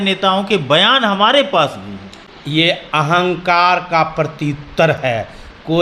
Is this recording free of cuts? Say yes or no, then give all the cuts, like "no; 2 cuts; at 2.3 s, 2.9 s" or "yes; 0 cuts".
yes; 0 cuts